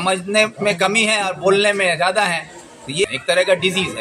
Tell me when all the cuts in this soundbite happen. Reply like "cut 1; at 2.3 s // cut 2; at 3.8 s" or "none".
cut 1; at 3.1 s